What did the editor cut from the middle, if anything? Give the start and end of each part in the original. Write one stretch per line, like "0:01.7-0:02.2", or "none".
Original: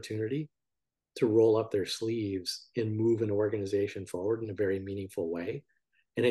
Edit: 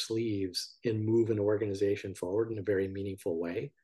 none